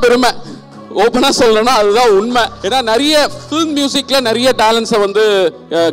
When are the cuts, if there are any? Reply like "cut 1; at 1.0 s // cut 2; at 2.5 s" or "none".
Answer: cut 1; at 2.6 s